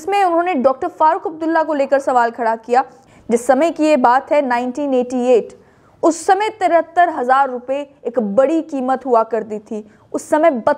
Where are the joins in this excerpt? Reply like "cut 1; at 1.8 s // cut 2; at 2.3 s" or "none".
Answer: cut 1; at 3.0 s